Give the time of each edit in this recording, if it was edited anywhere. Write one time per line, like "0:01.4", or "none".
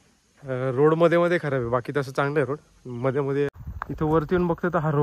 0:03.5